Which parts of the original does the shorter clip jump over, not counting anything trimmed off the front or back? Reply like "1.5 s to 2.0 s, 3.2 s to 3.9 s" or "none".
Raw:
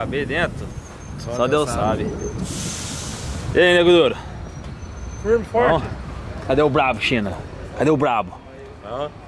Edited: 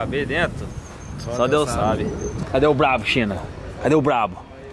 2.4 s to 6.3 s